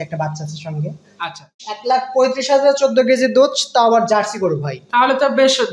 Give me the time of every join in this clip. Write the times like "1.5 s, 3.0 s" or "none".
1.6 s